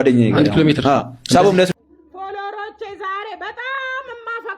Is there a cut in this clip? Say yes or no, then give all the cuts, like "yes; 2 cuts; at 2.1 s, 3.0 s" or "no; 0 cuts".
yes; 1 cut; at 1.7 s